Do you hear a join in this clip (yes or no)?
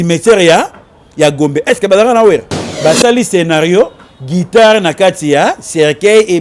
yes